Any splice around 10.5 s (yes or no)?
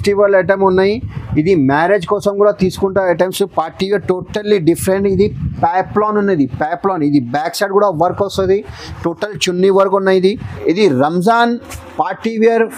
yes